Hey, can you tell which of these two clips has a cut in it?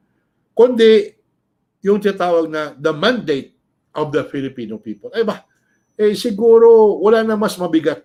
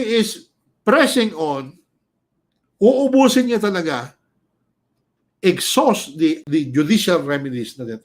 second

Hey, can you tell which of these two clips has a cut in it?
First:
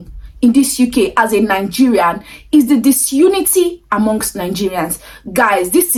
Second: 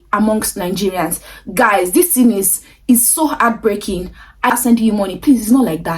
second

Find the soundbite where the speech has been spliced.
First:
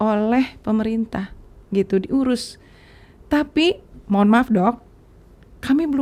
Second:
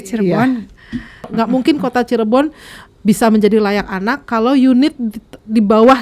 second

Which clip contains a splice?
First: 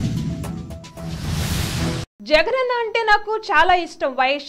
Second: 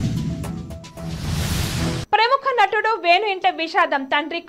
first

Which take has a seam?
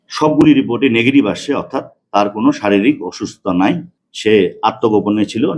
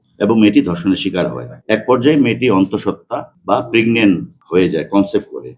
second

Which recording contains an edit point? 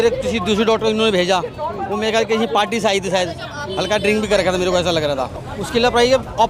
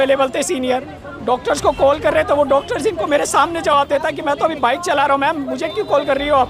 first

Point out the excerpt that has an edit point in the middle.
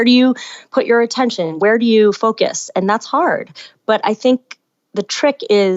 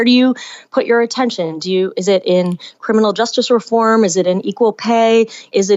first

